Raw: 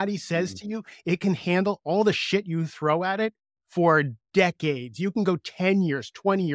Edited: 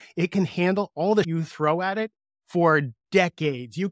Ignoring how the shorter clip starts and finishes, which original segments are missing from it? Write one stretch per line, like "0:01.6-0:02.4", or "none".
0:02.2-0:02.5